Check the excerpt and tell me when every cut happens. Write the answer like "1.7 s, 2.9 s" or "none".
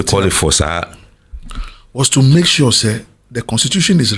none